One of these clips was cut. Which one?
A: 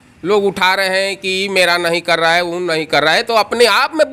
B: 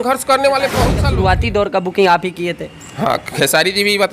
B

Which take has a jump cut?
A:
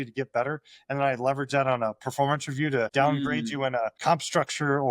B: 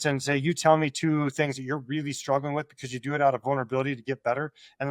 A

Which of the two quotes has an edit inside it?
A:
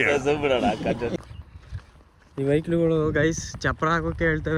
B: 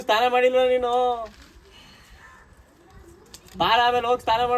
A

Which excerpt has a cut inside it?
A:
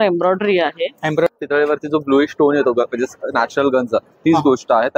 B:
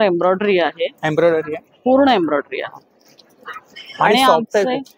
A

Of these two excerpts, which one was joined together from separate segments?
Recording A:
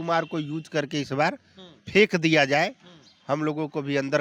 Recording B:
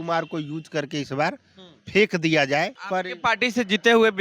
B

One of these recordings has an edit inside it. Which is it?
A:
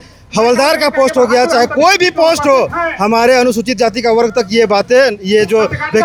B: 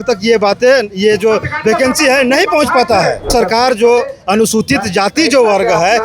B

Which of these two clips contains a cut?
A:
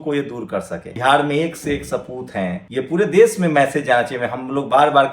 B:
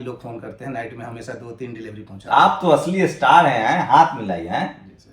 A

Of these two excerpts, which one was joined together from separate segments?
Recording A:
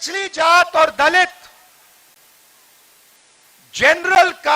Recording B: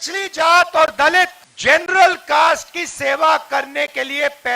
B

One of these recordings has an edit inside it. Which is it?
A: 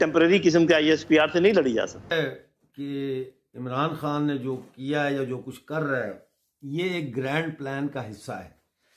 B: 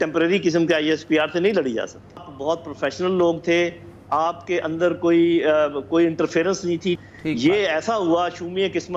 B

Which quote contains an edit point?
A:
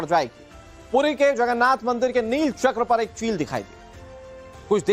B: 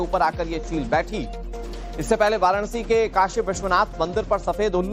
B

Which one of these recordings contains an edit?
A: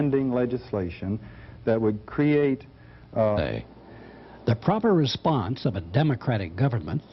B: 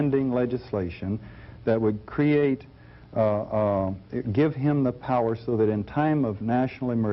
B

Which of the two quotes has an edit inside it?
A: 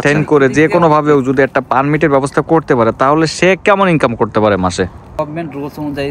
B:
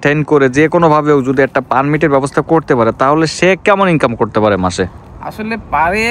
A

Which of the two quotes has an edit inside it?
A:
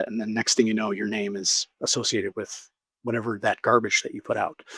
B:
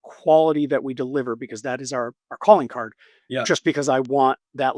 B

